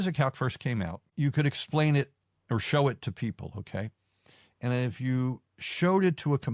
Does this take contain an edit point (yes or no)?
yes